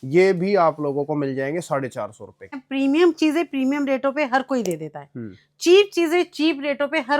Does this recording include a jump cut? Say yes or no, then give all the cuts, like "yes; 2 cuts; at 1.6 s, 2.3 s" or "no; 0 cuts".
yes; 1 cut; at 2.6 s